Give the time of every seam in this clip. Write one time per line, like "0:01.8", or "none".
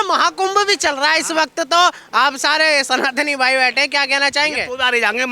none